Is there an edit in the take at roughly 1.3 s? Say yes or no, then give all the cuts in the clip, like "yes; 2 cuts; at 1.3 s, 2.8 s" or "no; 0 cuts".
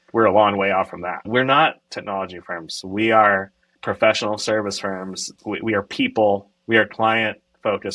yes; 2 cuts; at 1.3 s, 5.2 s